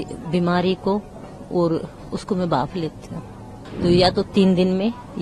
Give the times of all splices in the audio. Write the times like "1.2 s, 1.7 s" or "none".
3.6 s